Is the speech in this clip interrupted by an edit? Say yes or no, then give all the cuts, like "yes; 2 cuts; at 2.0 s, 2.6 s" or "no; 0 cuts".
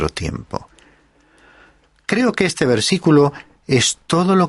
yes; 1 cut; at 2.4 s